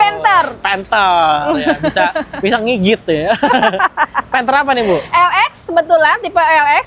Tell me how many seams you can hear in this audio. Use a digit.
0